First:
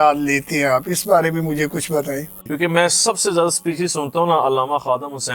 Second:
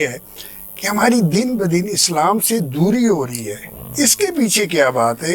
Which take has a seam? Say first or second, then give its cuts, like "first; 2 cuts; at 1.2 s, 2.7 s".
first; 1 cut; at 2.4 s